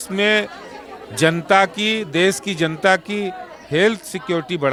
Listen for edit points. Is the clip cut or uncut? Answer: uncut